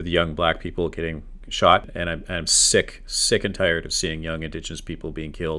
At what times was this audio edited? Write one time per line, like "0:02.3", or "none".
0:01.9